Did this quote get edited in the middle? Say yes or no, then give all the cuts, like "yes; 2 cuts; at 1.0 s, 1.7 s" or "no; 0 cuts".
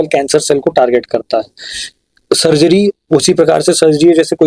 no; 0 cuts